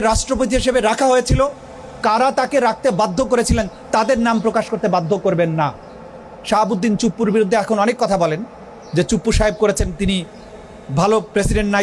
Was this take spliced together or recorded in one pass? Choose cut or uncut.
uncut